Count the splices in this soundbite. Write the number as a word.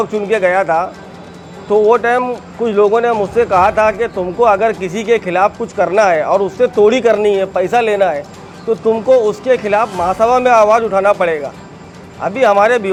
zero